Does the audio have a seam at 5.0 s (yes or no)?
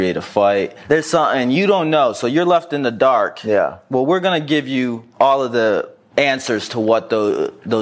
yes